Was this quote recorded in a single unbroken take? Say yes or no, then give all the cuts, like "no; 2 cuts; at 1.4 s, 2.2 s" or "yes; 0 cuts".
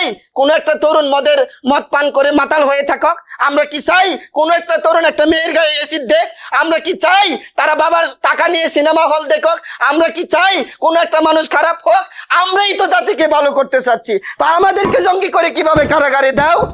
yes; 0 cuts